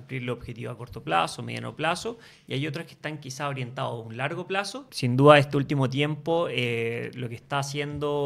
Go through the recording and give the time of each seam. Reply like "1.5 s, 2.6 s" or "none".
4.9 s